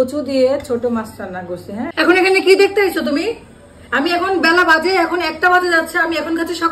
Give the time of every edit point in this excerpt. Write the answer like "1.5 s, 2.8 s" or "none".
1.9 s